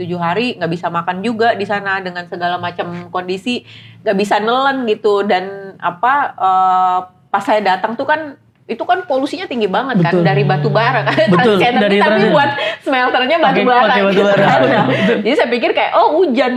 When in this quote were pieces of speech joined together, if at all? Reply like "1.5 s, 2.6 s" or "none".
none